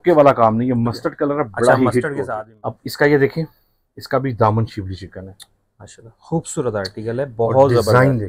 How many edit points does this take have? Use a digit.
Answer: 1